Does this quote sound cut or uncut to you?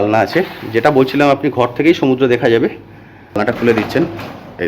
cut